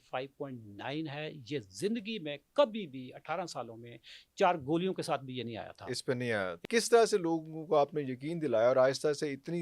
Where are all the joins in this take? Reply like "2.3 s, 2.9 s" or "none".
6.5 s